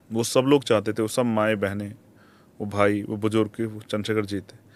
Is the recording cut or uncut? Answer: uncut